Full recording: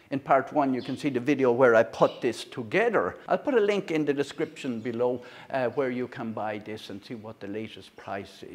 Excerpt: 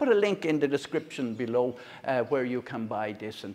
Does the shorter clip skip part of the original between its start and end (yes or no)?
no